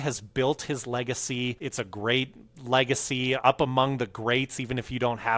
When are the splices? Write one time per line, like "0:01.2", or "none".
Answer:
0:01.6
0:03.4